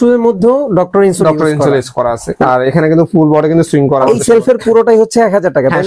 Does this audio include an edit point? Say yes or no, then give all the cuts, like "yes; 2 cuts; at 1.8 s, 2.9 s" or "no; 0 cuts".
yes; 2 cuts; at 2.3 s, 4.0 s